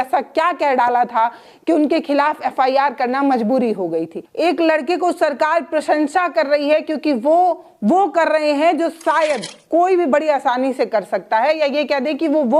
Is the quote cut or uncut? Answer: cut